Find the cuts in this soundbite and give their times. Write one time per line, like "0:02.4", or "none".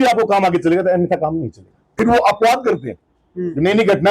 0:01.8